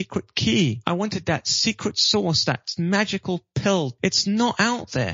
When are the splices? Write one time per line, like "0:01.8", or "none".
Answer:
0:00.8
0:03.9